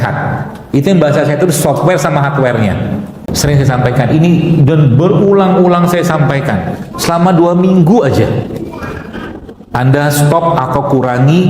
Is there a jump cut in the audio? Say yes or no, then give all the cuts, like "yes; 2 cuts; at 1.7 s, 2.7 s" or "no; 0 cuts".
yes; 1 cut; at 3.2 s